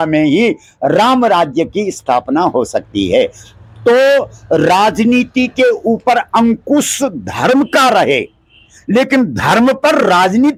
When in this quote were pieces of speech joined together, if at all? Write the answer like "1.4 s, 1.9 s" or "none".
none